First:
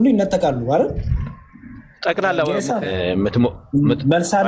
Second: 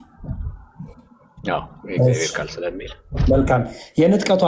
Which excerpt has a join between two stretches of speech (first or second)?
first